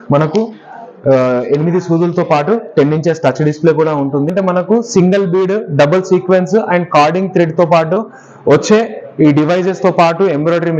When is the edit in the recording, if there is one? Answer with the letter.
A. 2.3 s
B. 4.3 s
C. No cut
B